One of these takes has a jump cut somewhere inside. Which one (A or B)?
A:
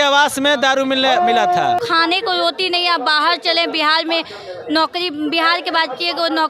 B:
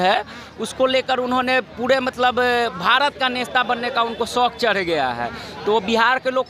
A